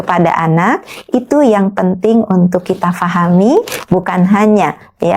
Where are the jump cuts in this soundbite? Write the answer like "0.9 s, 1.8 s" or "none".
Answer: 3.8 s